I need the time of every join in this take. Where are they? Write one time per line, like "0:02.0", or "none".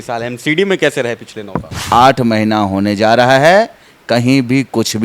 0:01.8